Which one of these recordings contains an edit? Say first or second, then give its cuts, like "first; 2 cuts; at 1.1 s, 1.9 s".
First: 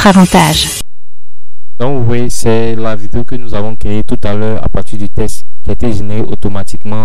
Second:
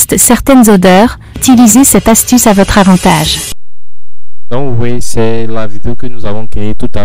second; 1 cut; at 1.4 s